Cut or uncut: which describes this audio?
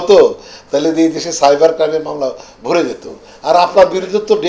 uncut